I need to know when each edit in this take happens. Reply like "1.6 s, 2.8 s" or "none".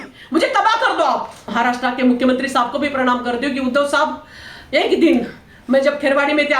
1.4 s